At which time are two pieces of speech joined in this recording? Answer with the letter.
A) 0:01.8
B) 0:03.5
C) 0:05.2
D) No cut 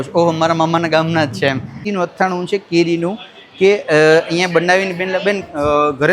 A